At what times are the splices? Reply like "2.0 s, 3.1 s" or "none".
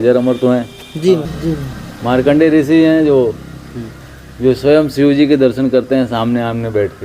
1.3 s